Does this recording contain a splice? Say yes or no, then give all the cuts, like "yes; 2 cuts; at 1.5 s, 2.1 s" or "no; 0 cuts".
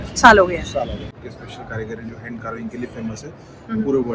yes; 1 cut; at 1.1 s